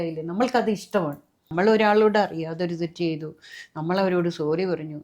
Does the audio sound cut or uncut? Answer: cut